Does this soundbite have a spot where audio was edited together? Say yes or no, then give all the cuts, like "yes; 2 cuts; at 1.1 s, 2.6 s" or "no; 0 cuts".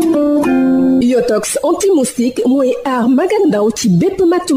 yes; 1 cut; at 0.9 s